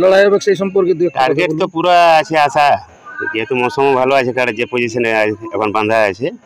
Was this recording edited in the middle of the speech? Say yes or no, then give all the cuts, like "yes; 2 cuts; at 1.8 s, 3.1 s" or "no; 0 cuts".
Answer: no; 0 cuts